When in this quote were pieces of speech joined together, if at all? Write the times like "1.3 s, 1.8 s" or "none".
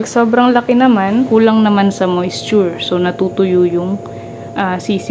1.3 s